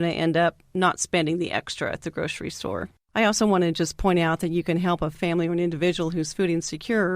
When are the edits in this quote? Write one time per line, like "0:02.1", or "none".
0:02.9
0:05.2